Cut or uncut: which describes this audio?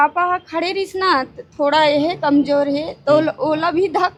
uncut